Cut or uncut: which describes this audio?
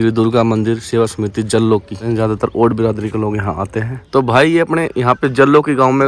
cut